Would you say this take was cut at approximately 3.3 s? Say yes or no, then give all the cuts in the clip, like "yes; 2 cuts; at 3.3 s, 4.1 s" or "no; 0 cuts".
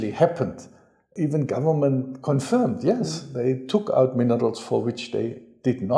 no; 1 cut; at 1.1 s